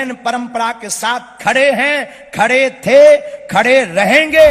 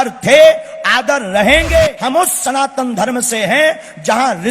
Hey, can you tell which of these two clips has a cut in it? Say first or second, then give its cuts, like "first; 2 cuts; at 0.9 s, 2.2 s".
second; 1 cut; at 2.0 s